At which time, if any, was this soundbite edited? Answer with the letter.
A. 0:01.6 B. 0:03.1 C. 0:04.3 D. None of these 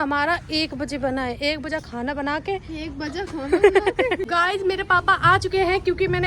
C